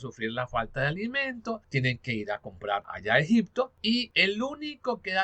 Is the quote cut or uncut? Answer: cut